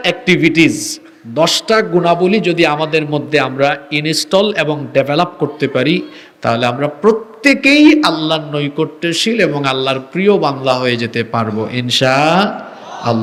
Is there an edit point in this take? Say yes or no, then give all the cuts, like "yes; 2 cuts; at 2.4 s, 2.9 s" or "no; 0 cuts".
no; 0 cuts